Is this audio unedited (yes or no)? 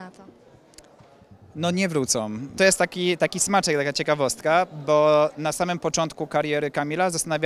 no